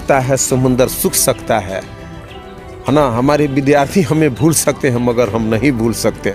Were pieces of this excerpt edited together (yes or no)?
no